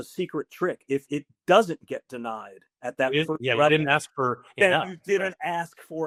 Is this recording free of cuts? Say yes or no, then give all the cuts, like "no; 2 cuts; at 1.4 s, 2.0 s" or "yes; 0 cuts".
yes; 0 cuts